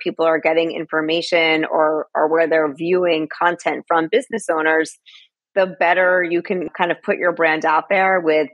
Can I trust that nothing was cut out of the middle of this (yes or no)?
yes